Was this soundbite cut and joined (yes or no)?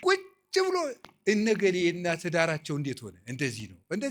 no